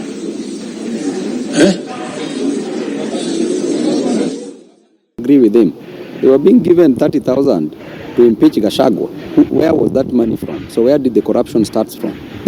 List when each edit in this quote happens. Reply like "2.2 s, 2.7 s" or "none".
4.8 s